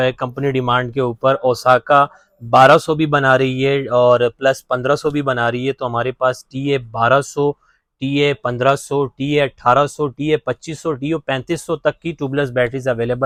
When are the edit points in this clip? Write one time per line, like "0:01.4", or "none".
none